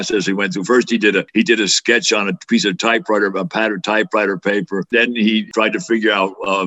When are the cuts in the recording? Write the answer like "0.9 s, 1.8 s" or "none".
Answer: 1.3 s, 4.9 s